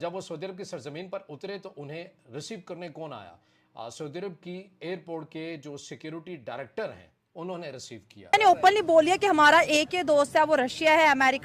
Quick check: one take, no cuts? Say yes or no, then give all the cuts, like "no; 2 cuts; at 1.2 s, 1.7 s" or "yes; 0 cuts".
no; 1 cut; at 8.2 s